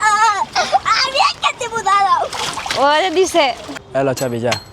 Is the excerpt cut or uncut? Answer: cut